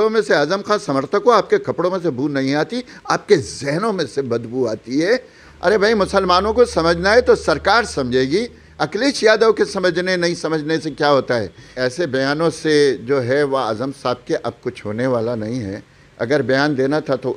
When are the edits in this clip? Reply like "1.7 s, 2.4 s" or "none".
5.4 s, 11.6 s